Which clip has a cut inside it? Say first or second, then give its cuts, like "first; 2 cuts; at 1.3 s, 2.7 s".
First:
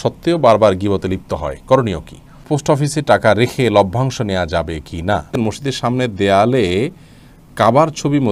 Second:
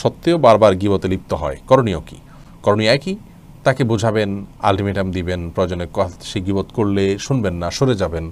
first; 2 cuts; at 2.4 s, 5.3 s